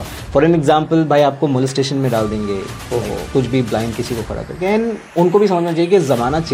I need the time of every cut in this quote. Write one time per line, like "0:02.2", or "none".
none